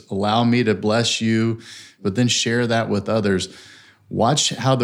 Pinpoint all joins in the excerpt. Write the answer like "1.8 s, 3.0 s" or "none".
2.0 s